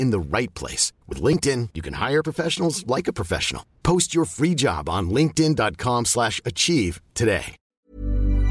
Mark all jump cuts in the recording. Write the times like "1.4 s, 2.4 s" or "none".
7.6 s